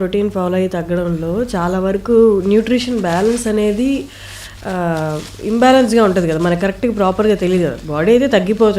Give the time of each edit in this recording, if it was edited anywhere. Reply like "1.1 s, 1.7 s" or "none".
none